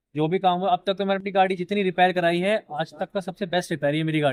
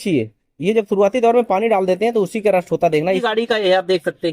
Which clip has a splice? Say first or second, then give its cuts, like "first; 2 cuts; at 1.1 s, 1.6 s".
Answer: second; 1 cut; at 3.2 s